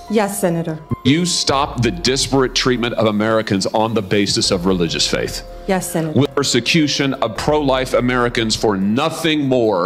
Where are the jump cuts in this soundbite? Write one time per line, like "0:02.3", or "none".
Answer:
0:00.9
0:06.3

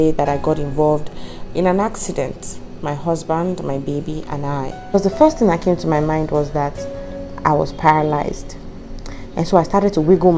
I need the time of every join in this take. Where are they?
0:04.8

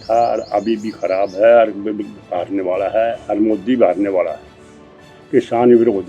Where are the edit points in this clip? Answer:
none

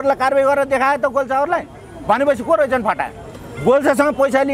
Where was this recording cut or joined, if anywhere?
none

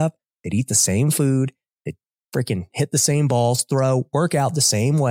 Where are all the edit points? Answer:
none

